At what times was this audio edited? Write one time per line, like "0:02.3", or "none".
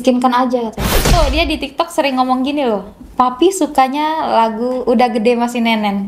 0:01.1